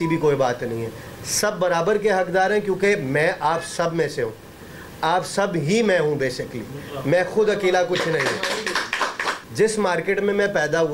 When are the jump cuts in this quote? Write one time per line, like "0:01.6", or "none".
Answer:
0:09.3